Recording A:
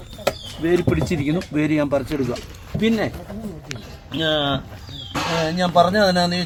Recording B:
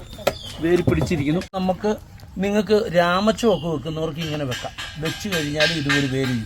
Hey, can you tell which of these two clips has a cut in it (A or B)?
B